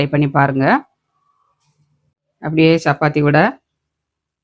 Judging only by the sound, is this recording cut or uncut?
cut